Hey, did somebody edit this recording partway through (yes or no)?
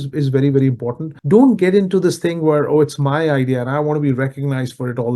yes